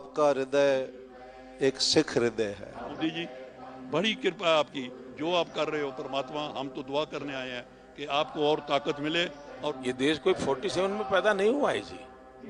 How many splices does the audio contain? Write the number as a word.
two